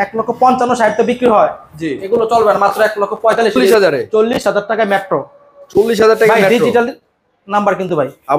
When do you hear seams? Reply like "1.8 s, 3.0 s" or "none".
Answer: 3.6 s